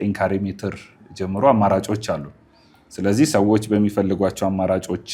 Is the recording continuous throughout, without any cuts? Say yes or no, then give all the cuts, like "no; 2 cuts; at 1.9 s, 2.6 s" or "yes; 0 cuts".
yes; 0 cuts